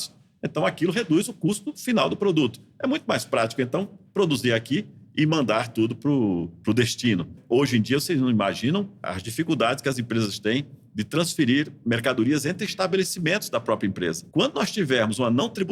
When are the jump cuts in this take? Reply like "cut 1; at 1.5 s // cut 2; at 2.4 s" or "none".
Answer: cut 1; at 7.4 s // cut 2; at 9.1 s // cut 3; at 14.2 s